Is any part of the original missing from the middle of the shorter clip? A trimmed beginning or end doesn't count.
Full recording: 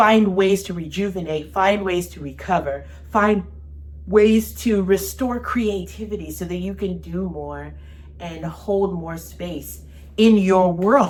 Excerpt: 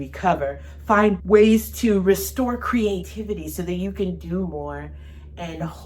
yes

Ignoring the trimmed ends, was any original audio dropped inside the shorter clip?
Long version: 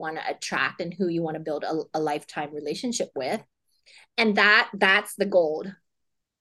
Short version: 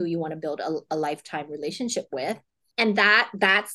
yes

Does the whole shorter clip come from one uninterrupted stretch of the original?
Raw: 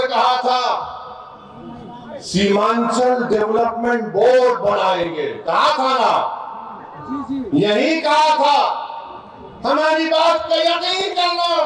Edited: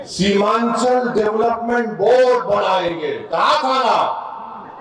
yes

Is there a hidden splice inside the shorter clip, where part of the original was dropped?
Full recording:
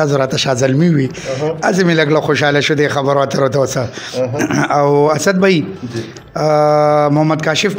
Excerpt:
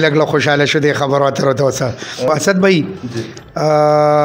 yes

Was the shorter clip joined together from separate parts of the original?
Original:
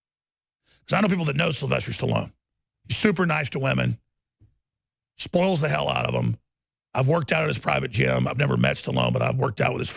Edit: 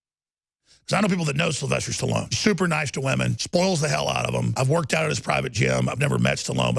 yes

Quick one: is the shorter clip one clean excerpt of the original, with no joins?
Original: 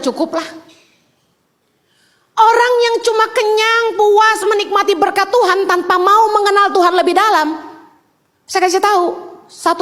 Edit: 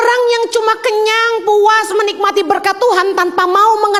yes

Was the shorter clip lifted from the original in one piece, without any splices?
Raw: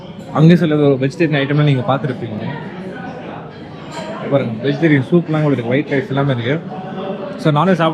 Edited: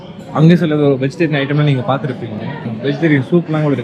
no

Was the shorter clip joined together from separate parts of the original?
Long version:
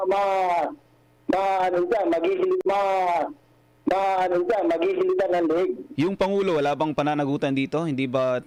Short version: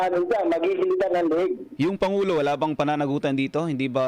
yes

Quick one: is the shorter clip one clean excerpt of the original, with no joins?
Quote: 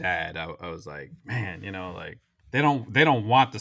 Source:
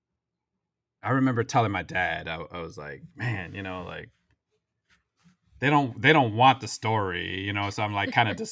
no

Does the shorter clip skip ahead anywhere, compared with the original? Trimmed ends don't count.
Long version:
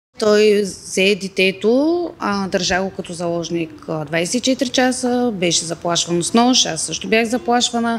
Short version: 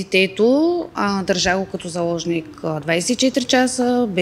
no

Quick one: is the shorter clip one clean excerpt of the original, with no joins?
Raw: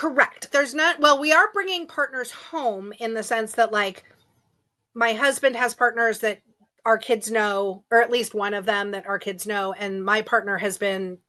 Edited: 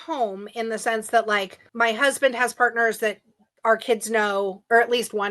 no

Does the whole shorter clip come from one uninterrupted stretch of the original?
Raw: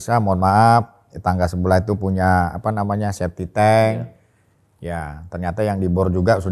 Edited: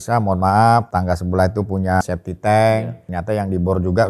no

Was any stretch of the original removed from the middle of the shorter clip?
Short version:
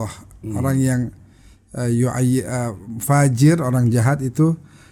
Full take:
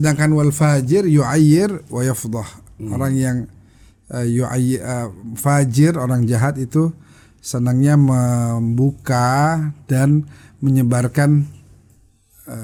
no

